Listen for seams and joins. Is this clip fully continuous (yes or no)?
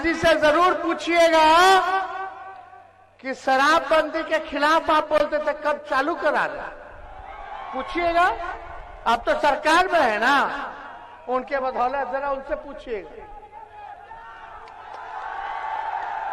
yes